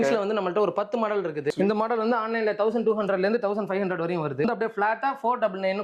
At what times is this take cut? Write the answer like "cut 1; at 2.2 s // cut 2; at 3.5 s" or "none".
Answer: cut 1; at 1.5 s // cut 2; at 4.4 s